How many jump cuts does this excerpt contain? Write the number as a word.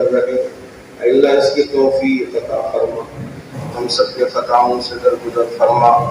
one